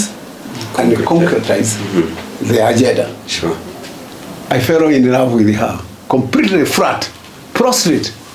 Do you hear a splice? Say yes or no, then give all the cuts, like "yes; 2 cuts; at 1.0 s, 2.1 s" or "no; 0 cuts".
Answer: yes; 1 cut; at 4.0 s